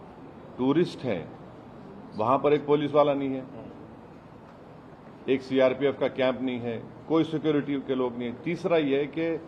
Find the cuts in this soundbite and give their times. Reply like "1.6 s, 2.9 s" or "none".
none